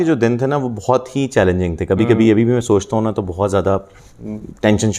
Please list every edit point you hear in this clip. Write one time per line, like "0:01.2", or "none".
none